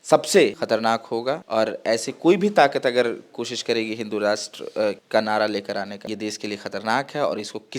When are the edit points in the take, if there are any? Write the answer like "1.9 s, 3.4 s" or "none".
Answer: 0.8 s, 6.1 s